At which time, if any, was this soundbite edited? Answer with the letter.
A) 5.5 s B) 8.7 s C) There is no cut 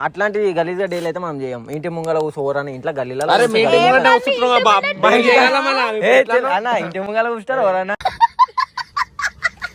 C